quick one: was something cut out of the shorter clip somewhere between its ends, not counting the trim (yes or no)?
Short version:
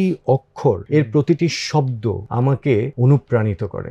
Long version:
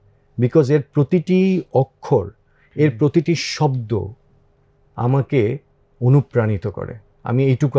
yes